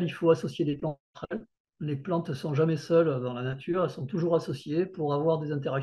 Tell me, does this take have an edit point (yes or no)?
no